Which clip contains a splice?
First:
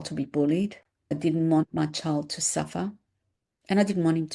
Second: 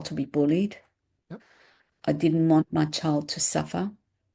first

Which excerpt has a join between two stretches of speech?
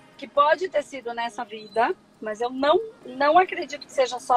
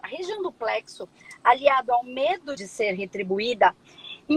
second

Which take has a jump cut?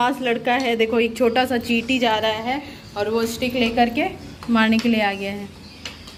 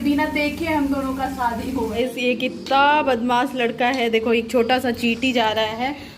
second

